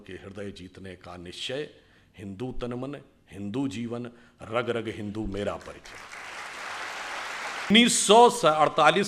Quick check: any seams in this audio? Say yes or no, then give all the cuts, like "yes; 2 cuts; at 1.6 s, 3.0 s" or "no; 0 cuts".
yes; 1 cut; at 7.7 s